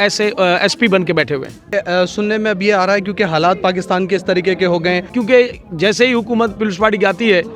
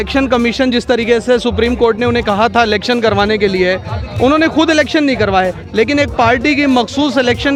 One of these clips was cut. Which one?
first; 2 cuts; at 1.7 s, 5.1 s

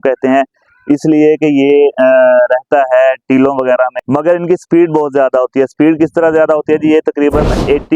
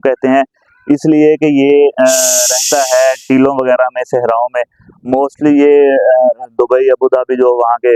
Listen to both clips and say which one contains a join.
first; 1 cut; at 4.0 s

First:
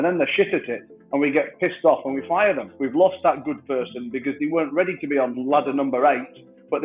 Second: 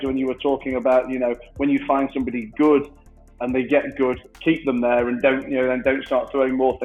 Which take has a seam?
first; 2 cuts; at 2.7 s, 5.4 s

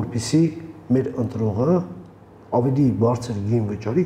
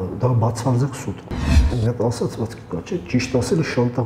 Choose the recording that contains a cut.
second; 1 cut; at 1.5 s

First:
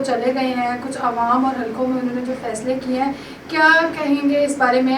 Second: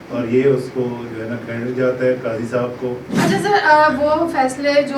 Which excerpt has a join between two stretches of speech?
second; 1 cut; at 3.1 s

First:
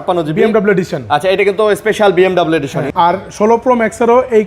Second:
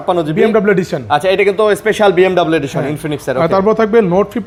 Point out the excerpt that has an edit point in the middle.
first; 1 cut; at 2.8 s

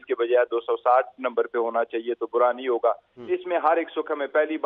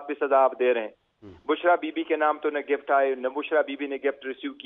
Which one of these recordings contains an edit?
first; 1 cut; at 3.2 s

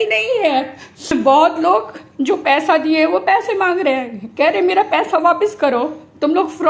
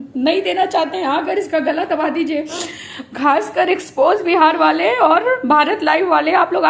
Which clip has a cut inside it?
first; 1 cut; at 1.1 s

